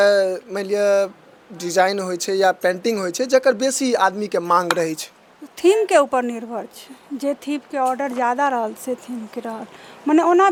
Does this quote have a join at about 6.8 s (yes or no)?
no